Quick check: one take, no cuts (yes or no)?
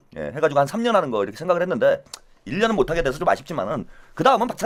yes